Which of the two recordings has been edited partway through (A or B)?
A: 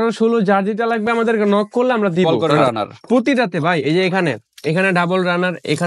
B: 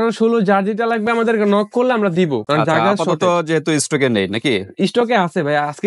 A